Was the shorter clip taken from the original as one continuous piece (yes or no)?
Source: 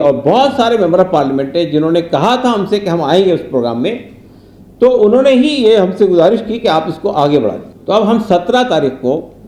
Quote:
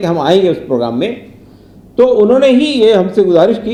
yes